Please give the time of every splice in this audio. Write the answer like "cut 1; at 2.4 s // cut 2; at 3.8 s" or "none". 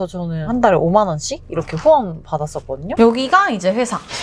cut 1; at 2.9 s